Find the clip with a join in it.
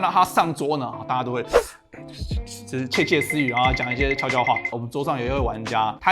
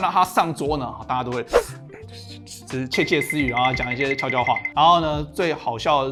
first; 1 cut; at 4.7 s

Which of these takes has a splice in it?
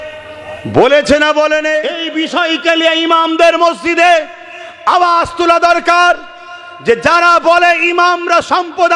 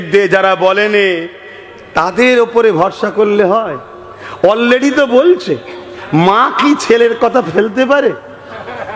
first; 1 cut; at 2.0 s

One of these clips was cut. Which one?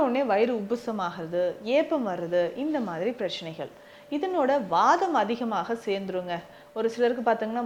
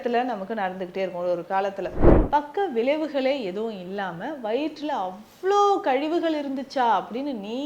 second; 1 cut; at 2.1 s

